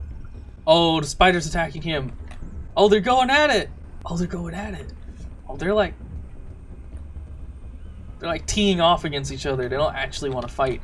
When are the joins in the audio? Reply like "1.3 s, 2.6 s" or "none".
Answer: 3.9 s

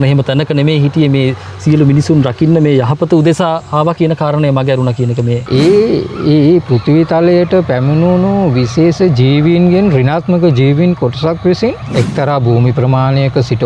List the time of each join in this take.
5.4 s, 11.8 s

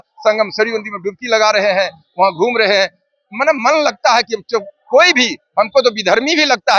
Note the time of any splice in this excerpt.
none

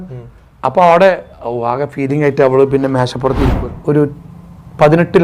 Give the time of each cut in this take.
3.5 s

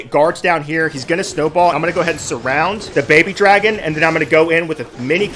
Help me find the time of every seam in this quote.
none

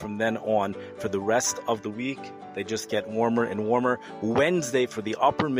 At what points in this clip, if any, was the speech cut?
none

